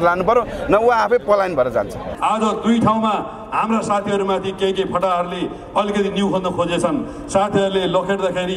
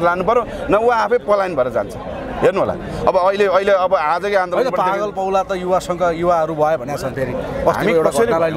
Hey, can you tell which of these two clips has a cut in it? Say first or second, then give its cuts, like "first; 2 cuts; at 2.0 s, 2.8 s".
first; 1 cut; at 2.0 s